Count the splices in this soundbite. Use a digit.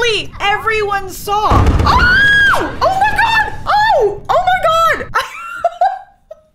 1